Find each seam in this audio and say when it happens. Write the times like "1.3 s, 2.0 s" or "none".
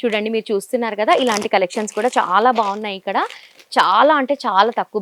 none